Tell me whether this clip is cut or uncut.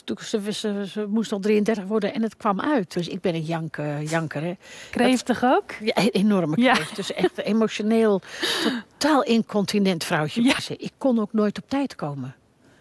cut